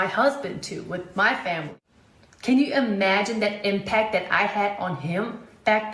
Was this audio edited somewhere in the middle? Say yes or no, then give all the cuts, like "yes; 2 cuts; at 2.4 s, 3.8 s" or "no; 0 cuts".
yes; 1 cut; at 1.4 s